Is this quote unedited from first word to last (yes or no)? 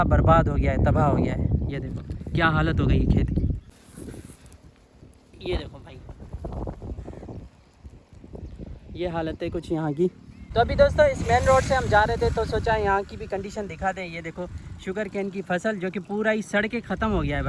no